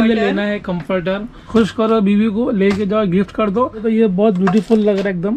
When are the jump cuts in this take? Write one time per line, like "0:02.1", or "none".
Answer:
0:01.3
0:03.8